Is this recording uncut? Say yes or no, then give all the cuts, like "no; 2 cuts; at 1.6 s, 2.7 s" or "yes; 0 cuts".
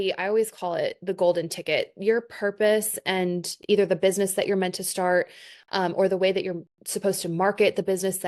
yes; 0 cuts